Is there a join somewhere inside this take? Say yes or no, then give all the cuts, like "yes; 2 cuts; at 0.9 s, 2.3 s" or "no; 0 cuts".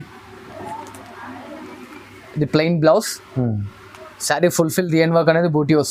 no; 0 cuts